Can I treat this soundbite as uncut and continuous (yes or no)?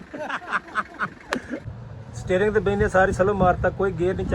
no